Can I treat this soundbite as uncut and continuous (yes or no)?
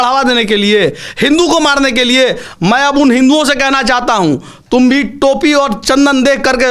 yes